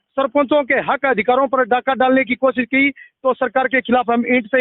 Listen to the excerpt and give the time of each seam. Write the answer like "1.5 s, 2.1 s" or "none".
none

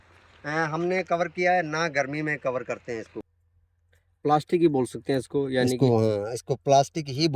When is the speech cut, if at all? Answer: 3.4 s

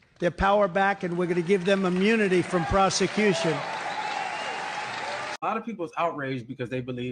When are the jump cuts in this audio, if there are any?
5.3 s

